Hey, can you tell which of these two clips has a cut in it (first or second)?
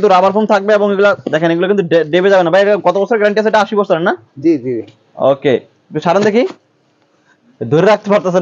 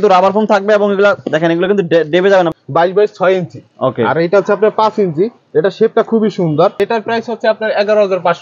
second